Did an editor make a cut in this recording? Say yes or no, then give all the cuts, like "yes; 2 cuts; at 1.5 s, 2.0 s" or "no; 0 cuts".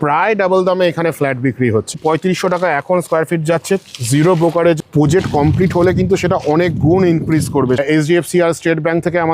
yes; 3 cuts; at 1.9 s, 4.8 s, 7.8 s